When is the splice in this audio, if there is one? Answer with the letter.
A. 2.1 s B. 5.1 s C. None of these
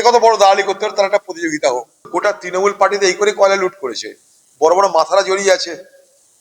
A